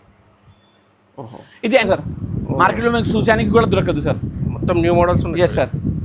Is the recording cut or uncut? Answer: cut